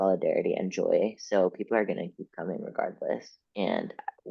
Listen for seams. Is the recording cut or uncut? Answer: cut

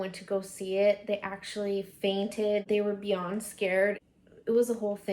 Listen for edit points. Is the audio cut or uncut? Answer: uncut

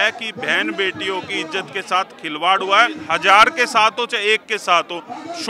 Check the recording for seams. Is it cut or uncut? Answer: cut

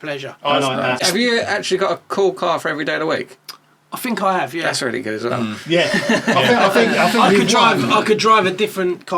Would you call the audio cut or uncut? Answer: cut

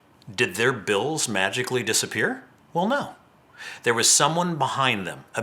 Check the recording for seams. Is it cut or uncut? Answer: cut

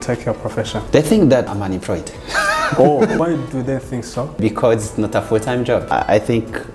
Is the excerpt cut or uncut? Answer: cut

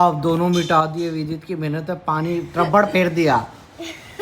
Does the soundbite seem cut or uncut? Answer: uncut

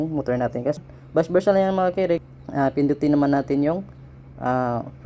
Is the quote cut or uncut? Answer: cut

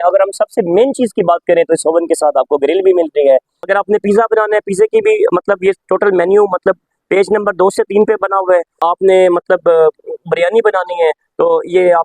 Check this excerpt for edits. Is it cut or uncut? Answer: cut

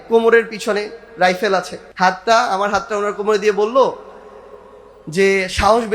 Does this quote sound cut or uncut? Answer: cut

